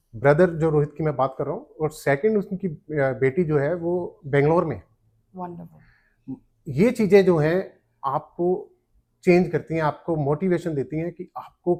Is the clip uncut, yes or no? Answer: yes